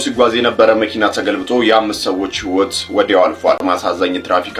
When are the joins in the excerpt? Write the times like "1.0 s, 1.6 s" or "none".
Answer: 3.6 s